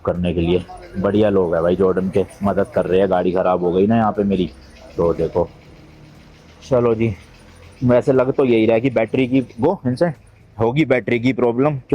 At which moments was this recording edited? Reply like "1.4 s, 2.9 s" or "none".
none